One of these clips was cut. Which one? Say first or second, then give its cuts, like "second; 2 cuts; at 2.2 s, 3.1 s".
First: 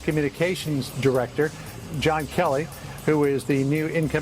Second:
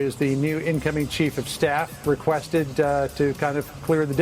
first; 1 cut; at 1.7 s